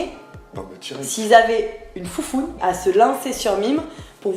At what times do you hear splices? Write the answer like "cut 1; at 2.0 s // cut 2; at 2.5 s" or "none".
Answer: cut 1; at 2.5 s

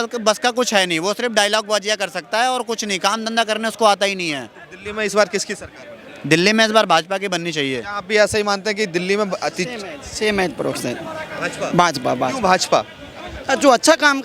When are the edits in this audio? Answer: none

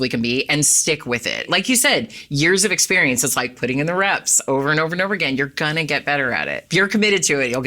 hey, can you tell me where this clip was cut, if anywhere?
cut 1; at 1.4 s // cut 2; at 6.6 s

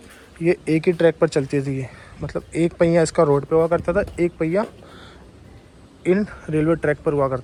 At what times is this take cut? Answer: none

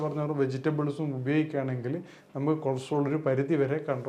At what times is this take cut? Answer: none

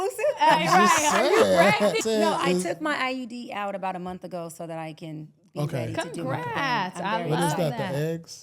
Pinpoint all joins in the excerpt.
cut 1; at 2.0 s

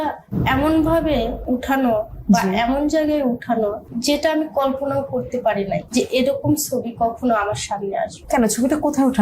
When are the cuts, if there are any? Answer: cut 1; at 1.4 s // cut 2; at 3.9 s // cut 3; at 5.9 s // cut 4; at 8.2 s

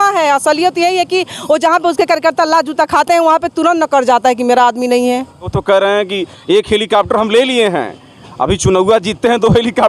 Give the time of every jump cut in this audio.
cut 1; at 5.5 s

